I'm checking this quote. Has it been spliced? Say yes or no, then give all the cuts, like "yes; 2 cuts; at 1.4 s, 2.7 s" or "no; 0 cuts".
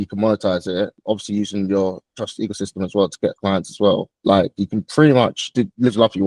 yes; 3 cuts; at 1.0 s, 4.1 s, 5.4 s